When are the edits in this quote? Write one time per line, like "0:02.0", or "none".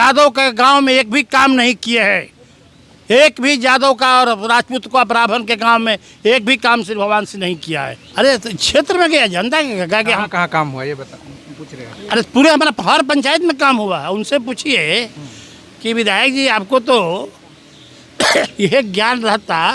0:08.0
0:18.5